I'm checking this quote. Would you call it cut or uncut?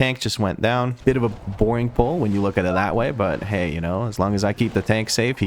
cut